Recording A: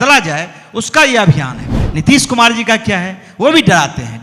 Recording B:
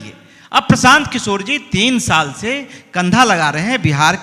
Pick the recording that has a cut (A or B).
A